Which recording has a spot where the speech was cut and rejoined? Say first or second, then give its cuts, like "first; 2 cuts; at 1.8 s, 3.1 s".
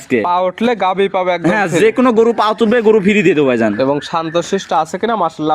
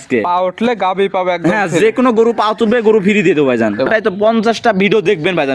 second; 1 cut; at 3.9 s